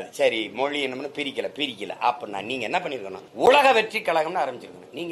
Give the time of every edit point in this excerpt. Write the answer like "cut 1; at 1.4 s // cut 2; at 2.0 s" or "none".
cut 1; at 3.2 s